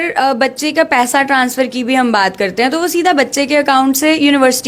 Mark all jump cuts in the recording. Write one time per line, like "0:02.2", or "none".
none